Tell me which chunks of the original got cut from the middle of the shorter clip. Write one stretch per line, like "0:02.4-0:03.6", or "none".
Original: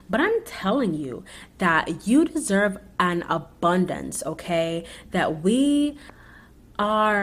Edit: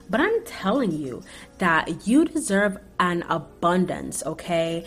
none